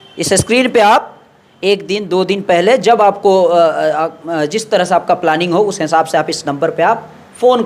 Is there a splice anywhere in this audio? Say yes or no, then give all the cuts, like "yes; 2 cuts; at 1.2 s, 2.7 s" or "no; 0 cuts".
no; 0 cuts